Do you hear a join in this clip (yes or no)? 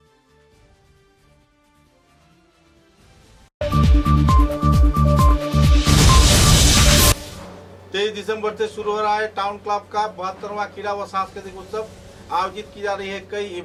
no